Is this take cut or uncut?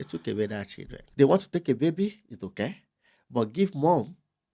cut